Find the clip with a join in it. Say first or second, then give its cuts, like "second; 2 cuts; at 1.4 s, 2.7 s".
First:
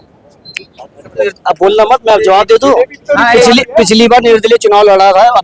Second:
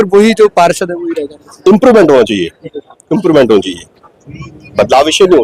first; 1 cut; at 1.3 s